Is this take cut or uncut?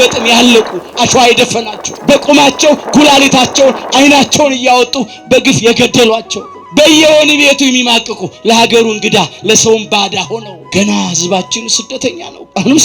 uncut